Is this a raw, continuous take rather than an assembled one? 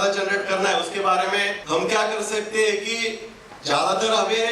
no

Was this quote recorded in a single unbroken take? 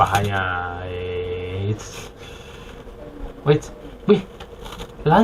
yes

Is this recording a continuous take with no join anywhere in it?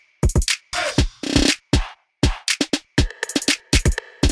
yes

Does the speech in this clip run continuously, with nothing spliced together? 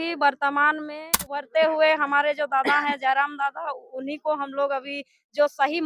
no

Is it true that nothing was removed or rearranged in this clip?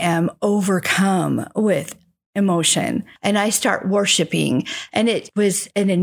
no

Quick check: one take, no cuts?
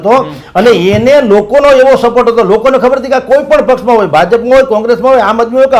yes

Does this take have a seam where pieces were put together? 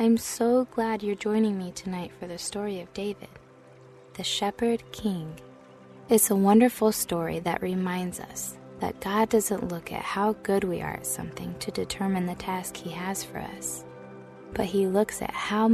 no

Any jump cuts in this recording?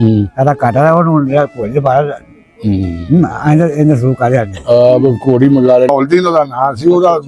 yes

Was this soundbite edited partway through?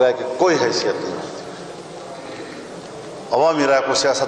no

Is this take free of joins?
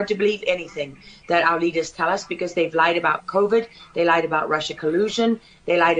yes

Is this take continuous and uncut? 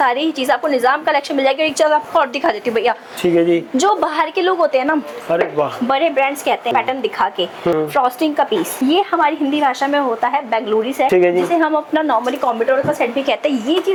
yes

